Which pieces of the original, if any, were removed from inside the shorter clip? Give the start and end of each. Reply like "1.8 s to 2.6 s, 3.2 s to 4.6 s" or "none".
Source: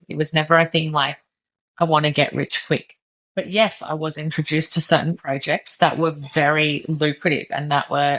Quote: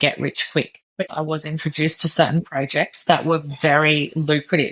3.2 s to 3.8 s